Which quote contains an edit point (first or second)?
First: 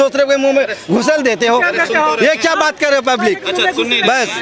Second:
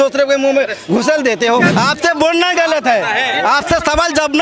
second